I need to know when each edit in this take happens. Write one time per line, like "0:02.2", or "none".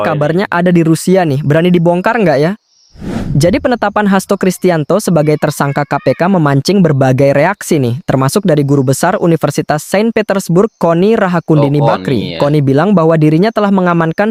none